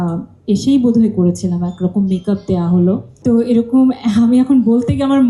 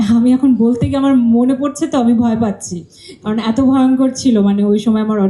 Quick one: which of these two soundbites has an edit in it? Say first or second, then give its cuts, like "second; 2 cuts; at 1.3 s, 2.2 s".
first; 1 cut; at 3.1 s